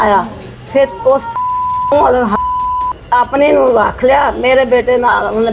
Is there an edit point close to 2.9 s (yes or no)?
yes